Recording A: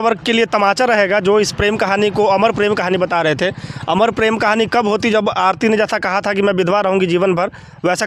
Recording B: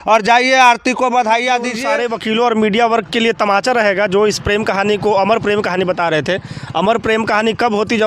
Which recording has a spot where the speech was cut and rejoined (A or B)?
B